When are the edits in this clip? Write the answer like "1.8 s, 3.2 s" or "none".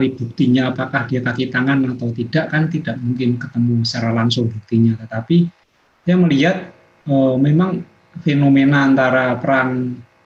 none